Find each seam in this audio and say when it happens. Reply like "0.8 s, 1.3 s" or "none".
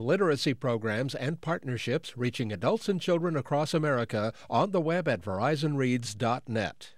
none